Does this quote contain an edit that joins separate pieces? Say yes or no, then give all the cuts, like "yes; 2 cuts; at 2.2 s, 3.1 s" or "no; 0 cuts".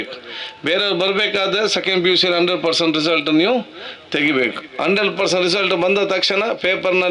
no; 0 cuts